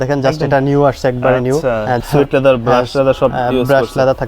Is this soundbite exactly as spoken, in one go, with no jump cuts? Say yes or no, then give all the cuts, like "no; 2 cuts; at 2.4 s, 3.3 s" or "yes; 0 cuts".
no; 1 cut; at 2.0 s